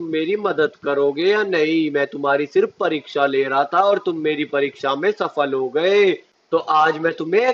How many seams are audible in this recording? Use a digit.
1